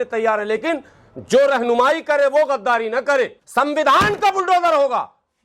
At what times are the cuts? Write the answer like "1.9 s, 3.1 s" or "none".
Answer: 3.4 s